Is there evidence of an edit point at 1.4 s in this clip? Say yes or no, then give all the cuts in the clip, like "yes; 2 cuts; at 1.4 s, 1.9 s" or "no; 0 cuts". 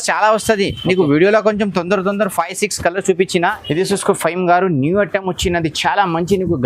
no; 1 cut; at 3.6 s